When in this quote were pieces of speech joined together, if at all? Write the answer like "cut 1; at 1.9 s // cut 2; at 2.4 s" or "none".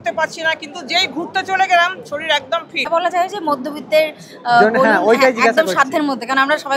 cut 1; at 2.9 s